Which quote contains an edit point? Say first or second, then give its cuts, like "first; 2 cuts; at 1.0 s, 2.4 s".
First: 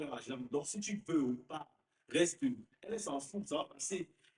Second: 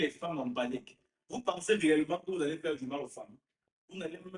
first; 1 cut; at 2.9 s